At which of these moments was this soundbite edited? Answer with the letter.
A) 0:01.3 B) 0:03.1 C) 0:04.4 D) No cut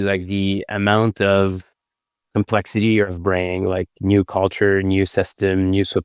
B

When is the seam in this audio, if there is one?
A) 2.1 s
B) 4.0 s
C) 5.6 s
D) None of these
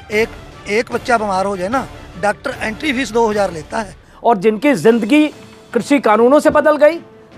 B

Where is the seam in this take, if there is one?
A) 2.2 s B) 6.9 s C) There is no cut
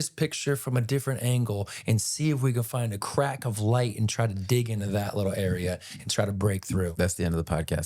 B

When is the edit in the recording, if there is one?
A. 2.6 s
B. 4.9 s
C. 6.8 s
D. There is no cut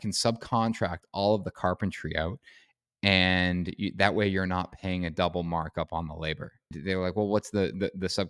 C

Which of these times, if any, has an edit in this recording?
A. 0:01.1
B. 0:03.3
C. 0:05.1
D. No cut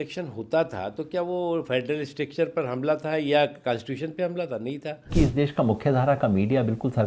C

